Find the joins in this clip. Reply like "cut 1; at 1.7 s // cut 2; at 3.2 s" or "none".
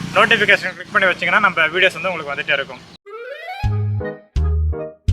cut 1; at 3.1 s